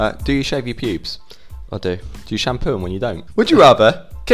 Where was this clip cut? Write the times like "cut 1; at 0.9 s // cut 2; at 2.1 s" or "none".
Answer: cut 1; at 3.2 s